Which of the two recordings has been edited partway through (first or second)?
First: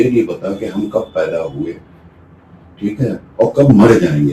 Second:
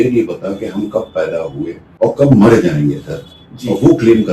second